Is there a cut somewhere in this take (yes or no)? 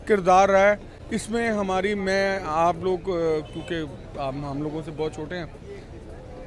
no